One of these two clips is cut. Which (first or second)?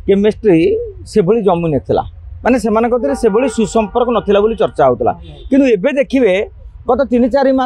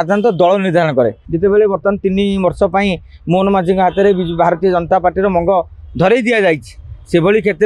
second